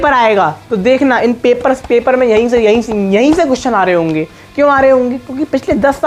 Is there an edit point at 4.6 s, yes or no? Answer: no